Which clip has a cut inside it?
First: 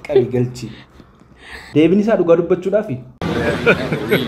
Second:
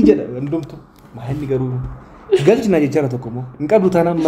first; 1 cut; at 1.6 s

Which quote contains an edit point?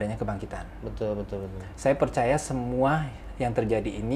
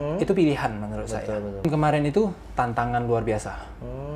second; 1 cut; at 1.6 s

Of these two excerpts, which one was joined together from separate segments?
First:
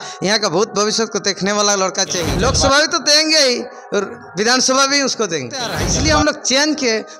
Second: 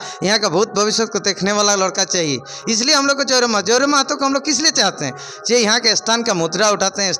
first; 2 cuts; at 2.3 s, 5.8 s

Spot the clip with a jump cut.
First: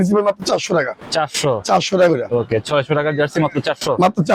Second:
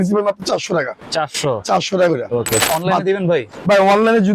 second; 1 cut; at 2.6 s

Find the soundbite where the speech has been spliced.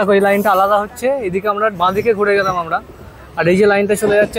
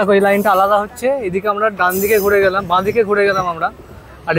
first; 1 cut; at 1.7 s

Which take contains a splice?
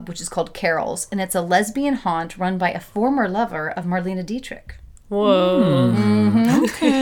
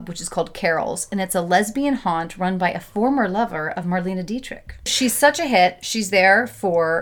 second; 1 cut; at 4.9 s

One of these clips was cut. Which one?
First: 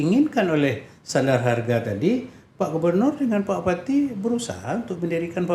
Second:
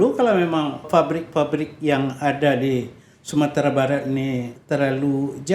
second; 2 cuts; at 0.8 s, 4.5 s

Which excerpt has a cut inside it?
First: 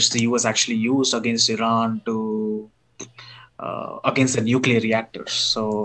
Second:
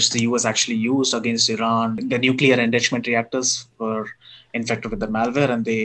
second; 1 cut; at 2.0 s

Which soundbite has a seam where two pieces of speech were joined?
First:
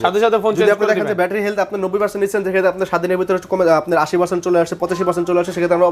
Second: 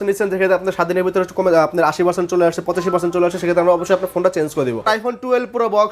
second; 1 cut; at 4.8 s

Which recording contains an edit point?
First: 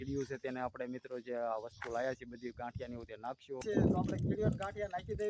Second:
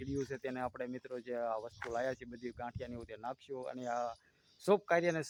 first; 1 cut; at 3.6 s

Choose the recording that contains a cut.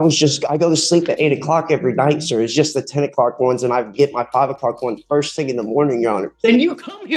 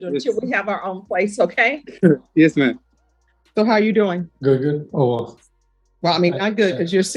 second; 1 cut; at 3.4 s

